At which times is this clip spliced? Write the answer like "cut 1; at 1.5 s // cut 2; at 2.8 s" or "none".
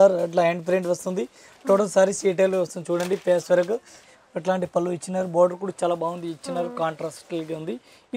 cut 1; at 4.0 s